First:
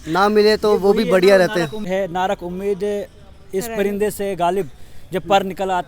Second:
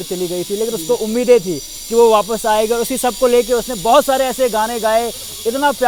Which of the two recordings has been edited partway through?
first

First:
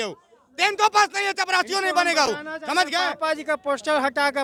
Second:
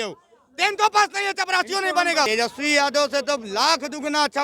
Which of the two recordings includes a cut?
second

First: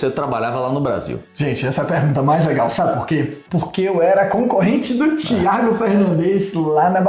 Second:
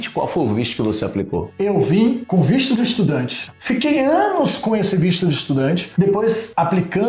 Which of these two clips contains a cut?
second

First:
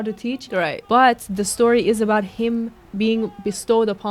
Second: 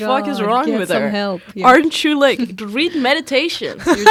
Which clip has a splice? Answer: first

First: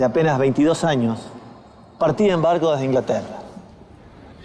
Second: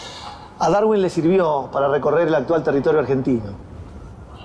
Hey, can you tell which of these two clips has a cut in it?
second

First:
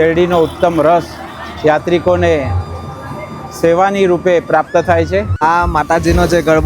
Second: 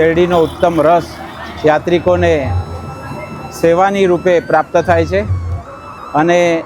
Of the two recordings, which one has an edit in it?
first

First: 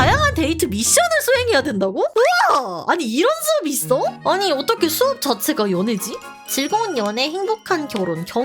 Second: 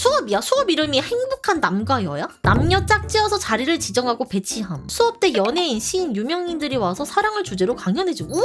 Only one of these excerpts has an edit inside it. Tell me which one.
first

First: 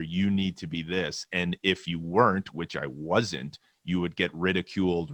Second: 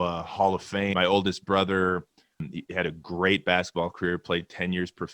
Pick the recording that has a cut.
second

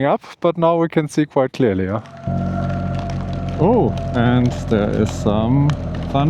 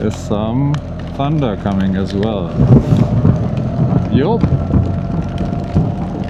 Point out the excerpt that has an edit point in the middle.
first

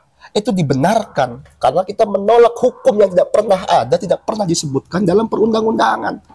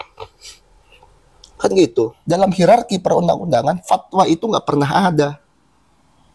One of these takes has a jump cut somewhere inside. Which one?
second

